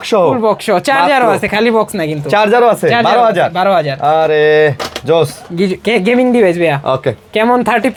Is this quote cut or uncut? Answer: uncut